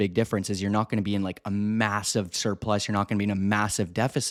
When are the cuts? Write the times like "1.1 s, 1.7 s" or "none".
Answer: none